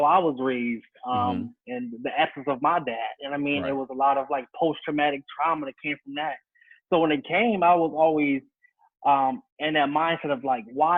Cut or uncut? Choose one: uncut